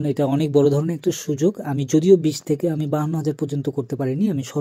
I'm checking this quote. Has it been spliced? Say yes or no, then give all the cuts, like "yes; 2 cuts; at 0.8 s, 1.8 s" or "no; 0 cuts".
no; 0 cuts